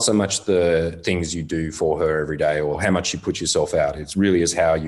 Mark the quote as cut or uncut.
cut